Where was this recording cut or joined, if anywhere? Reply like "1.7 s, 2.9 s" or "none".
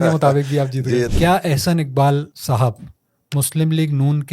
1.1 s, 2.3 s